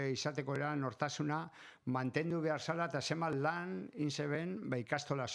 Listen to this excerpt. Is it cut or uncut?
uncut